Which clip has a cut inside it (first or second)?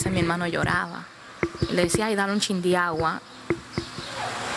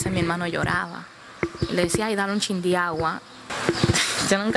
second